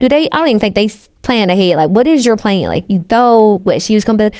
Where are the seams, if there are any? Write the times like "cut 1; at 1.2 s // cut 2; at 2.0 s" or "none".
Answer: none